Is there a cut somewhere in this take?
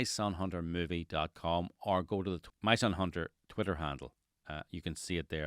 yes; 1 cut; at 2.4 s

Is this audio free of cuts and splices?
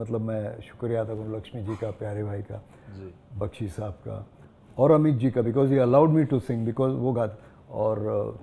yes; 0 cuts

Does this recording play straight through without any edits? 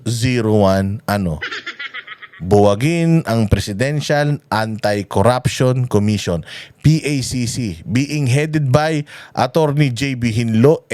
yes; 0 cuts

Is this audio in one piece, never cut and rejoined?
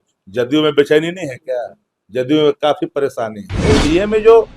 no; 1 cut; at 3.4 s

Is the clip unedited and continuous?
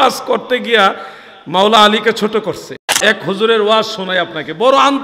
no; 1 cut; at 3.0 s

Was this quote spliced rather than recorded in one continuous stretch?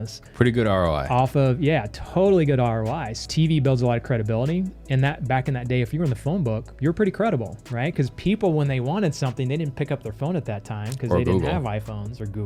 yes; 2 cuts; at 3.3 s, 6.7 s

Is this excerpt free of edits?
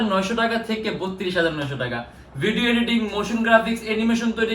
yes; 0 cuts

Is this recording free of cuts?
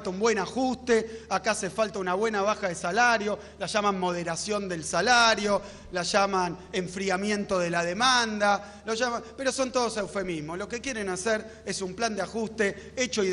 yes; 0 cuts

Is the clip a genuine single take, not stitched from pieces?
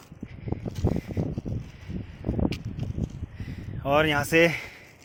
yes; 0 cuts

